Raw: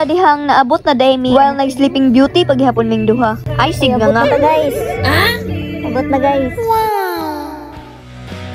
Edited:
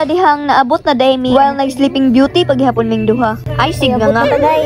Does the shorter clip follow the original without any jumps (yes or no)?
yes